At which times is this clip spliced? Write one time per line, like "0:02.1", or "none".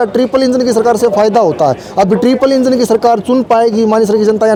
none